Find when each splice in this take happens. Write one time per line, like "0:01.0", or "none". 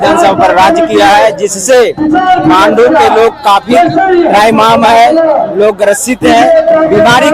none